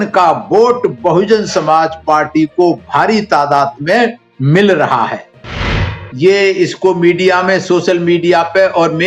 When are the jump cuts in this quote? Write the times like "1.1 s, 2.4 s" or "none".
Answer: 5.7 s